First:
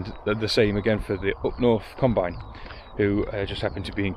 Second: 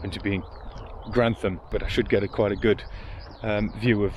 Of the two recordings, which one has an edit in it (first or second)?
second